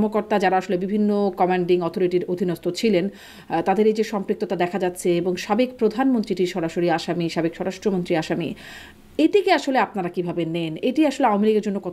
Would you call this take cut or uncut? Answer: uncut